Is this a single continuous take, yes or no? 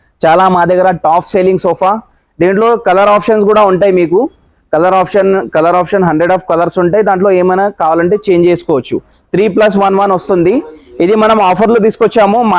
yes